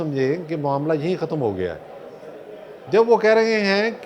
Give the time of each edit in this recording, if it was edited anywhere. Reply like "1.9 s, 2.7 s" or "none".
none